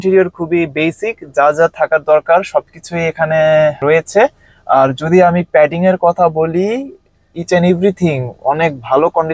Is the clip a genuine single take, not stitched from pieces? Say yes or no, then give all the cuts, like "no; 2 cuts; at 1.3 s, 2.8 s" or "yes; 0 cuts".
yes; 0 cuts